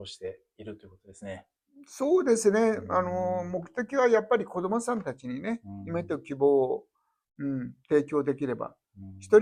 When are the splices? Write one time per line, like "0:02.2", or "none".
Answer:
none